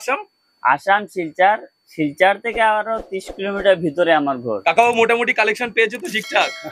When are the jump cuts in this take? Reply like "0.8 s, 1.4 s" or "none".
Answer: 4.6 s

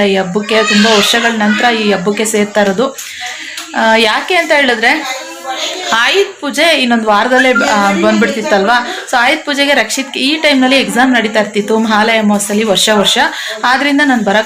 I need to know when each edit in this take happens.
none

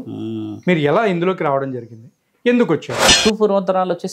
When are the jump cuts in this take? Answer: 3.0 s

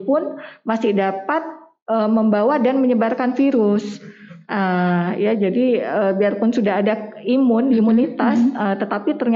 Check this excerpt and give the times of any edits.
none

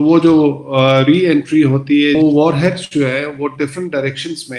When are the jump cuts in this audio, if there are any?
2.2 s

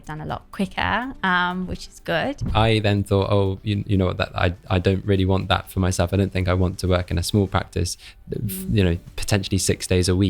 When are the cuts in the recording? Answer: 2.5 s

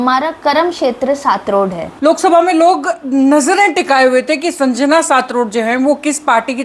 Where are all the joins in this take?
1.9 s

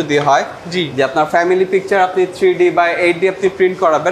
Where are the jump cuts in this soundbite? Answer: none

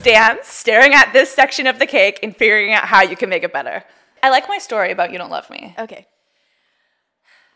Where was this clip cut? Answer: 4.1 s

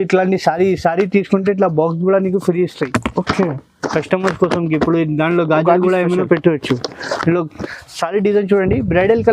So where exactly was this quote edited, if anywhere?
7.6 s

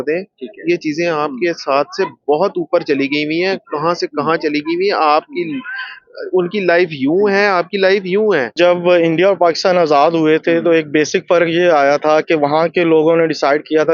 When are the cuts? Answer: 8.5 s

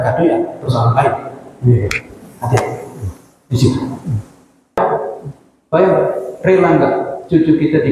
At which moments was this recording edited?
4.8 s

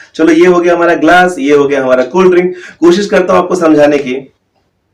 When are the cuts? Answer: none

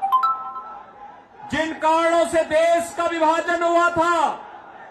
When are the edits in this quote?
3.8 s

